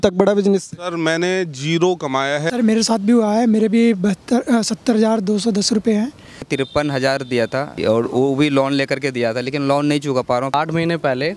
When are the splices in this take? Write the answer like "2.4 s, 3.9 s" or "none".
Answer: 2.4 s, 6.5 s, 7.8 s, 10.5 s

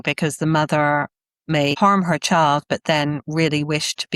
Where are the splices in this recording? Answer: 1.7 s

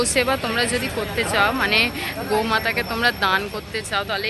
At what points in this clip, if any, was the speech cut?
none

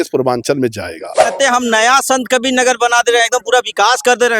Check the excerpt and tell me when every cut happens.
1.3 s

